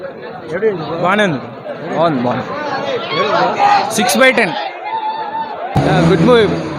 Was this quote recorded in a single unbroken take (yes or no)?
no